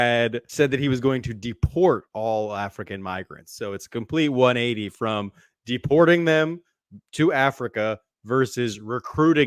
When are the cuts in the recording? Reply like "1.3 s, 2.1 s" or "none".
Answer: none